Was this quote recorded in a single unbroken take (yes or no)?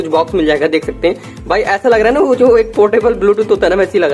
yes